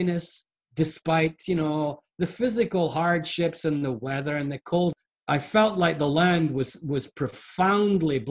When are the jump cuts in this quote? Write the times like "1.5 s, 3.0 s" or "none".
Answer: 4.9 s